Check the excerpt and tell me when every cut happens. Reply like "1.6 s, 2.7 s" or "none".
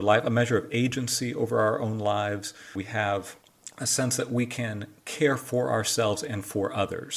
2.7 s